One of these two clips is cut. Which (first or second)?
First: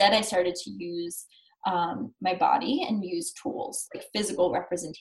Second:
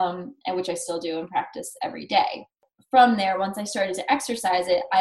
second